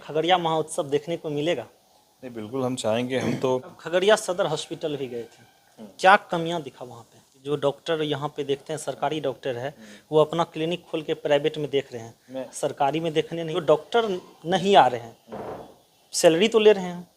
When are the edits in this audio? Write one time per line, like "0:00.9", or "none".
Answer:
0:03.8
0:07.4
0:13.5